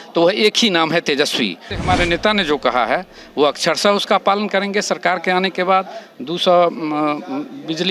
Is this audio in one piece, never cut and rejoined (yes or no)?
no